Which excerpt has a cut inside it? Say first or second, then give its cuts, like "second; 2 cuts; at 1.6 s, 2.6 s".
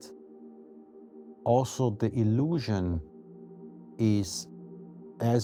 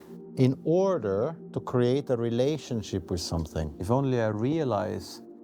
second; 1 cut; at 3.8 s